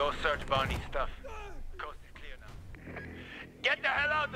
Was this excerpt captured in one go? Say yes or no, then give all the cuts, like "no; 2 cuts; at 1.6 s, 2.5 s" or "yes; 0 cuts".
no; 1 cut; at 2.8 s